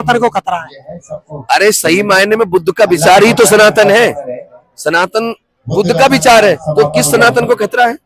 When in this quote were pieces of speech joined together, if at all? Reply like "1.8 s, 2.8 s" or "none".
none